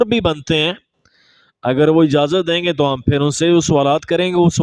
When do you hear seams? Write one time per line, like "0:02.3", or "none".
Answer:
none